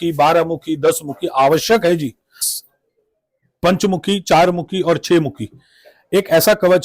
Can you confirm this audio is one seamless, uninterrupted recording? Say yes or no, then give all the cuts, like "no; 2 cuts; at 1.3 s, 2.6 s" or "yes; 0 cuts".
no; 1 cut; at 2.5 s